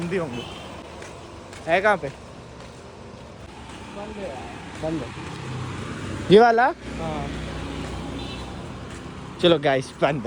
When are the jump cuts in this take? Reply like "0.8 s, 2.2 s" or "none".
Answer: none

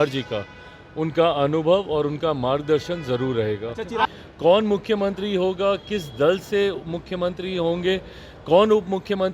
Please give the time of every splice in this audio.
4.1 s

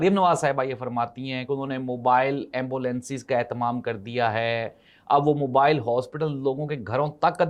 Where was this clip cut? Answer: none

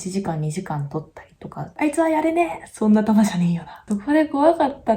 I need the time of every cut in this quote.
1.7 s, 3.9 s

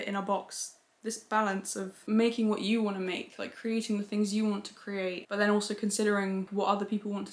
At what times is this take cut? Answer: 1.0 s, 5.2 s, 6.5 s

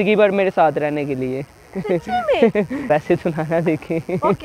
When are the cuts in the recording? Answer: 2.9 s

